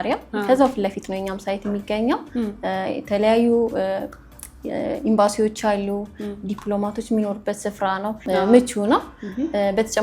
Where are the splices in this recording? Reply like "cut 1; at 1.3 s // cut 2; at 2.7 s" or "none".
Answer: cut 1; at 8.2 s

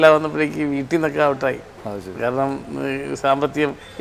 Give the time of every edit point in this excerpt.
none

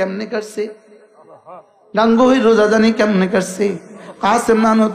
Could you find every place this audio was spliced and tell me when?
none

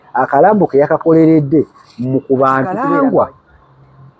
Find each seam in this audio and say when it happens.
cut 1; at 2.7 s

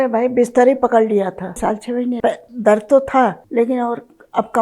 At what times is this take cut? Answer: cut 1; at 1.8 s // cut 2; at 3.4 s

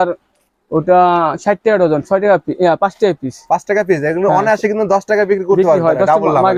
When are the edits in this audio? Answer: none

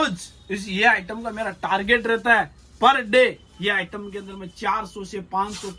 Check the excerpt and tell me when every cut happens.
none

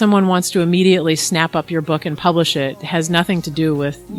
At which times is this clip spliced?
none

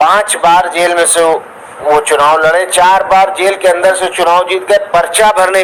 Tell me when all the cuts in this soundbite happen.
none

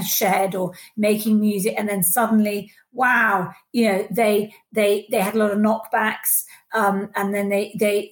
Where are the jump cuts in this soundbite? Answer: none

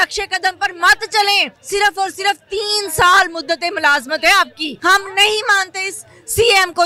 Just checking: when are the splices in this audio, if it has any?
cut 1; at 1.5 s // cut 2; at 4.6 s

